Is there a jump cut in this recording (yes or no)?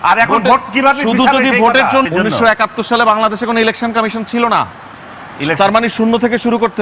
yes